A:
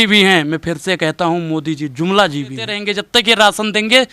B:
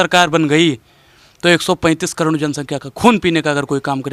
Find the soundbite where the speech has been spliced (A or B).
A